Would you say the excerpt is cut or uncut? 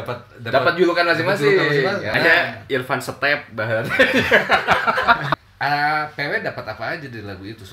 cut